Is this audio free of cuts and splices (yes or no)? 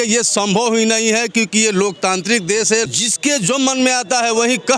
no